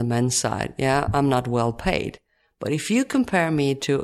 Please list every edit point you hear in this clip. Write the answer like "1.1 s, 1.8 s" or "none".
none